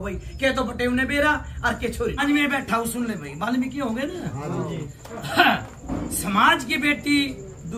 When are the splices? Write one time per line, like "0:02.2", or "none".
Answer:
0:02.2